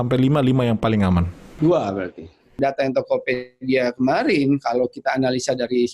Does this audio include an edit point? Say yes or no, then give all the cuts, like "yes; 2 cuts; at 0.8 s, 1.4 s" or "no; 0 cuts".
yes; 2 cuts; at 1.4 s, 2.6 s